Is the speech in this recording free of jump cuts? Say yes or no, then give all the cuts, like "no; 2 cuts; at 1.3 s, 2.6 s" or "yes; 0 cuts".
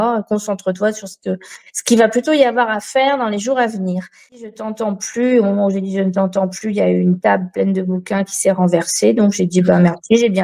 no; 1 cut; at 4.5 s